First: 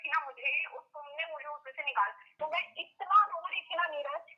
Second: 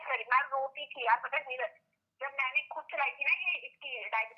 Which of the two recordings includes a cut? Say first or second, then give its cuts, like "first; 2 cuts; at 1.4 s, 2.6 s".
first; 1 cut; at 2.4 s